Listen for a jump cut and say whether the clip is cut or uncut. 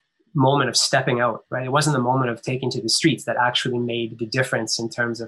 cut